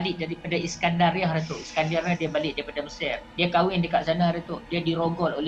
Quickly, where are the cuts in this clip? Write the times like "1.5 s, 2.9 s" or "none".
3.2 s